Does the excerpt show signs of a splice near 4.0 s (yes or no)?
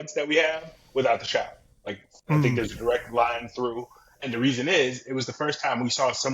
no